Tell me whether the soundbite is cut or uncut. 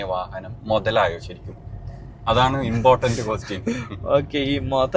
uncut